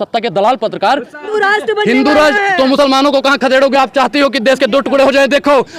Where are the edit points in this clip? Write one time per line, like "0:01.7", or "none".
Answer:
0:01.2